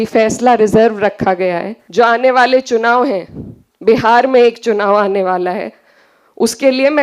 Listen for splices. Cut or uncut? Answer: cut